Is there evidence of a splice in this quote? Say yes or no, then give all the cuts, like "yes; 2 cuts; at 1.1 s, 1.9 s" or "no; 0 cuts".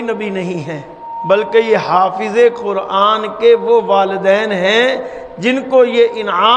yes; 1 cut; at 1.1 s